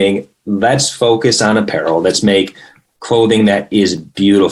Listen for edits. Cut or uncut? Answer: uncut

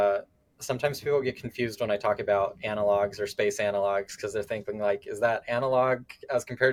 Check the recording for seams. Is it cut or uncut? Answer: uncut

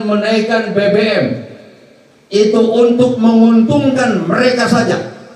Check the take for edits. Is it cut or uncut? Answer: uncut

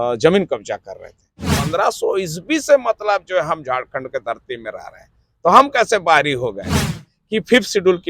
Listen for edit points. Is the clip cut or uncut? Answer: cut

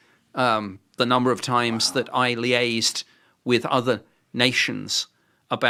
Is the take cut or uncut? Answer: uncut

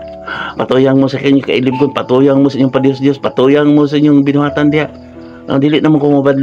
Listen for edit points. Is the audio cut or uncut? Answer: uncut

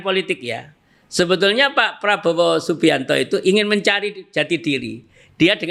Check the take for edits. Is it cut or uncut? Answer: uncut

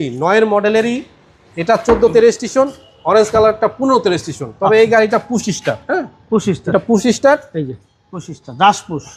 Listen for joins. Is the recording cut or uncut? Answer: uncut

